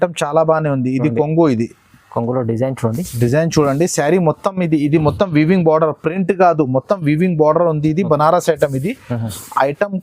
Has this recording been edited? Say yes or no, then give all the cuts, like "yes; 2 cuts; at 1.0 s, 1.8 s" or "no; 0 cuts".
no; 0 cuts